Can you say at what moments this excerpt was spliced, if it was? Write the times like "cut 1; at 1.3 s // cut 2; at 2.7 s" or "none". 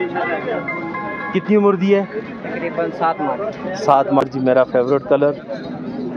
cut 1; at 4.2 s